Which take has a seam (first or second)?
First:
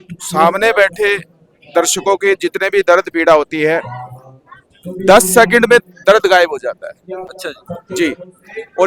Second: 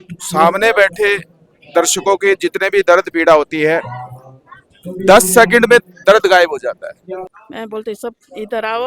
second